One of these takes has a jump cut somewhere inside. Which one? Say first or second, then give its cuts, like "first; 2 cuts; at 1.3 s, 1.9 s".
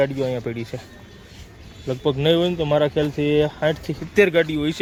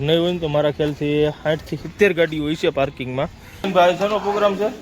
second; 1 cut; at 3.7 s